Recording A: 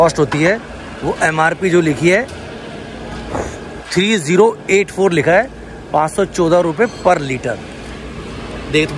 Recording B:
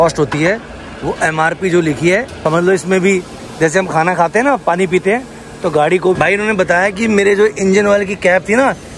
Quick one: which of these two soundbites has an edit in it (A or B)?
B